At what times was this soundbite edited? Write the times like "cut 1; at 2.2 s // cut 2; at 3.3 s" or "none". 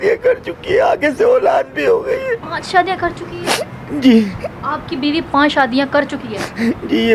none